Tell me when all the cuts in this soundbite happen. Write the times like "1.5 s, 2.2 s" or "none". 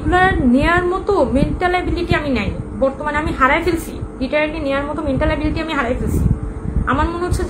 none